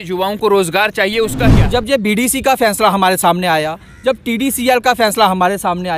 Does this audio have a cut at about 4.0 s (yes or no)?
no